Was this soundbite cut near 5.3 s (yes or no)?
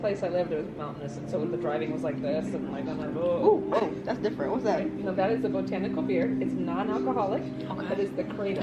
no